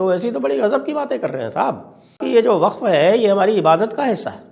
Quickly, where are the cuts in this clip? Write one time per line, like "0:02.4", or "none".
0:02.2